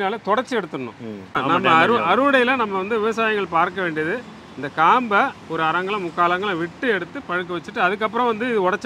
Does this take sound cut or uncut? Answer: cut